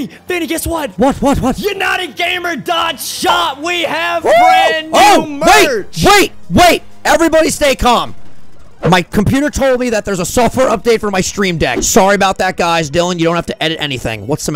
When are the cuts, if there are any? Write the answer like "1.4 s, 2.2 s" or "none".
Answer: 0.9 s, 11.8 s

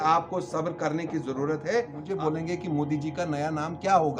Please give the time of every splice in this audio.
2.1 s

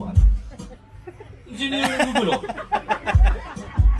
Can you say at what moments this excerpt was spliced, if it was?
1.6 s

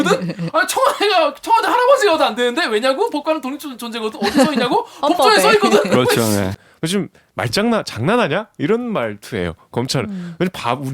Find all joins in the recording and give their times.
6.6 s

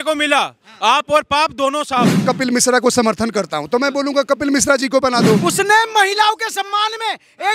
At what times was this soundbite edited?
2.2 s, 5.4 s

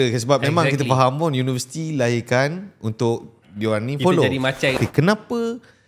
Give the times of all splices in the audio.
4.8 s

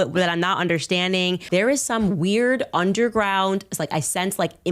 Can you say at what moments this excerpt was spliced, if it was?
1.5 s

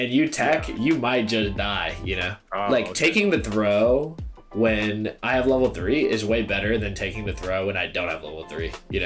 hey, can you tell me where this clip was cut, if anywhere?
2.4 s

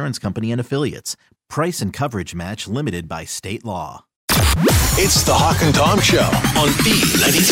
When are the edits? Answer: 4.2 s

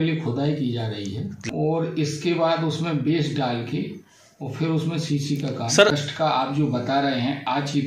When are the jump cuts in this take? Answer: 1.3 s, 5.9 s

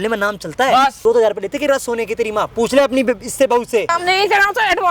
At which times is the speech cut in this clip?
1.0 s, 3.9 s

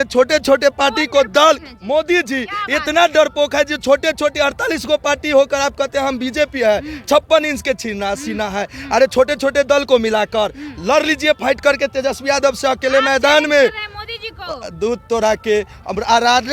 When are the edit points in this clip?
none

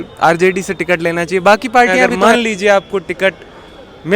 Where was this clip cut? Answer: 2.1 s

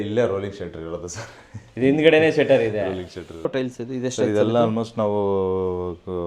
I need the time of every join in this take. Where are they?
3.5 s

